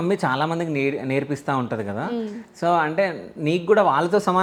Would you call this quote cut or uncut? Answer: uncut